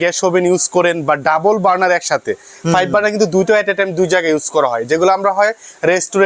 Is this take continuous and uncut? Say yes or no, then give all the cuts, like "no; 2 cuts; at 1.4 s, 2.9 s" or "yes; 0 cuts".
yes; 0 cuts